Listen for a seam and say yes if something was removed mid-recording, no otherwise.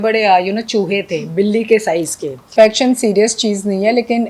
yes